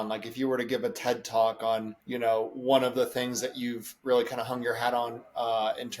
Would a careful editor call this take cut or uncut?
cut